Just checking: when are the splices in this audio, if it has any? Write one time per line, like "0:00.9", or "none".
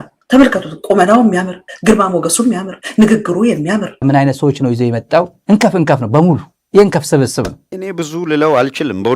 0:04.0
0:07.7